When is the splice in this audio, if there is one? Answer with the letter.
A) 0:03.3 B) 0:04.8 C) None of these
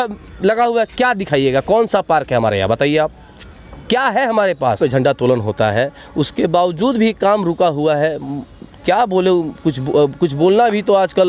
B